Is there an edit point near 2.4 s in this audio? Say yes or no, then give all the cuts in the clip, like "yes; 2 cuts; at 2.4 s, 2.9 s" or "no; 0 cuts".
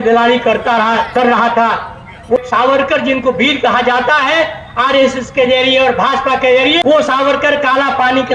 yes; 2 cuts; at 2.4 s, 6.8 s